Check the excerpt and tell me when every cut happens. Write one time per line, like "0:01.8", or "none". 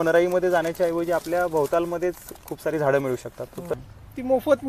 0:03.8